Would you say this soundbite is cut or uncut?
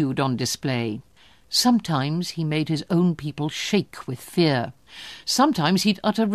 cut